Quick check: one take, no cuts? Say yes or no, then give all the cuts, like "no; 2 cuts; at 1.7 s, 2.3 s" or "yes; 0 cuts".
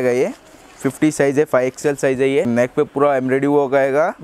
no; 1 cut; at 2.5 s